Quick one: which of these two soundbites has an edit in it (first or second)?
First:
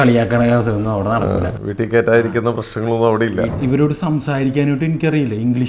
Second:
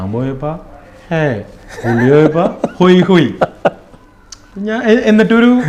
first